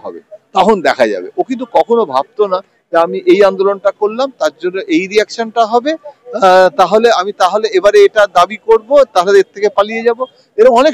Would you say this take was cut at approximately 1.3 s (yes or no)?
no